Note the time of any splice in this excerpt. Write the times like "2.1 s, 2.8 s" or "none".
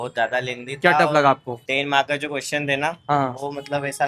1.6 s